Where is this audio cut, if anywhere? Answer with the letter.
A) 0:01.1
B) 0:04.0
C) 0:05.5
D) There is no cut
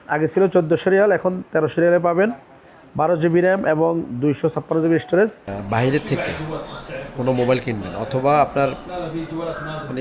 C